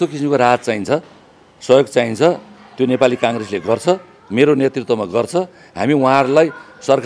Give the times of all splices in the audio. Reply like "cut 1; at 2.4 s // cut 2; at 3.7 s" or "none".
none

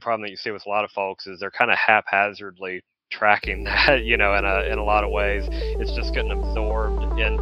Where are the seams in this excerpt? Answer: none

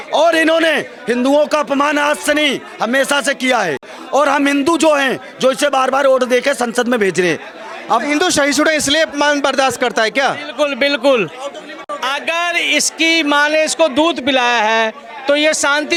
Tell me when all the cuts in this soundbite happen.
none

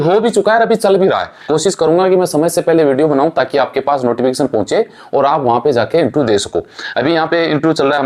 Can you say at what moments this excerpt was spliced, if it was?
cut 1; at 1.3 s

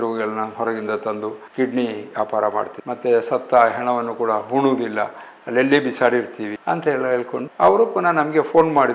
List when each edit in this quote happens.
cut 1; at 1.4 s // cut 2; at 6.5 s // cut 3; at 7.5 s

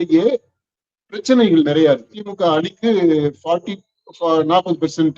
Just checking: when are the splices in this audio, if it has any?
cut 1; at 2.2 s

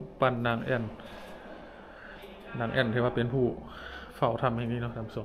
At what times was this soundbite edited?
none

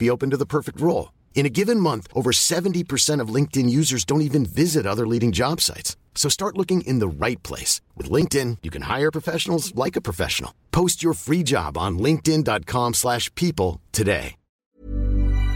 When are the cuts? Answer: cut 1; at 14.5 s

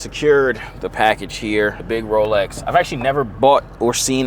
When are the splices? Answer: cut 1; at 1.8 s

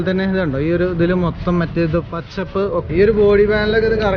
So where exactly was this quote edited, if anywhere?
cut 1; at 2.8 s

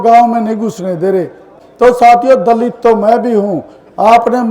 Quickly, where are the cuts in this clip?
cut 1; at 1.5 s

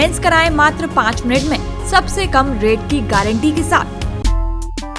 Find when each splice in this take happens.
cut 1; at 4.0 s

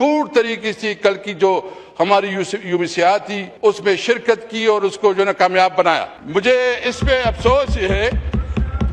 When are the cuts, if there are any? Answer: cut 1; at 3.4 s // cut 2; at 6.1 s

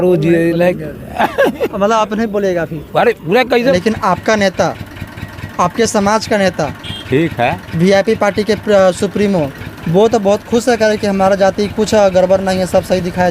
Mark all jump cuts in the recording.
cut 1; at 3.6 s

